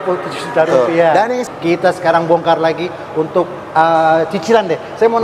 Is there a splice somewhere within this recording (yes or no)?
yes